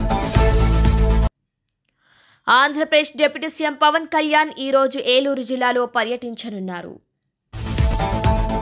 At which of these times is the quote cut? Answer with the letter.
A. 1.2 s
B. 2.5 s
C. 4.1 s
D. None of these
A